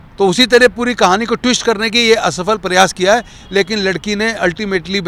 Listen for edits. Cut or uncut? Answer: uncut